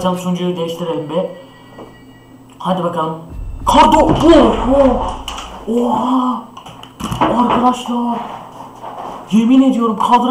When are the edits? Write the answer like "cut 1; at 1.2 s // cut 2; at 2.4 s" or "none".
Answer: none